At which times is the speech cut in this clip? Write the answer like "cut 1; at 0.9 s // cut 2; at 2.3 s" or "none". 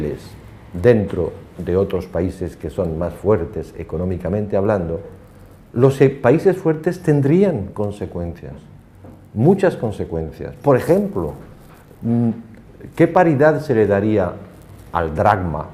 cut 1; at 2.4 s